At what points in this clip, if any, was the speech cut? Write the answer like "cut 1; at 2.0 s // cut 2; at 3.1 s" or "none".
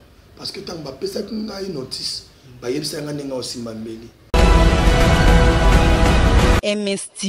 cut 1; at 4.1 s